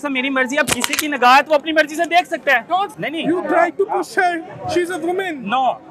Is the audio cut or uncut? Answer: cut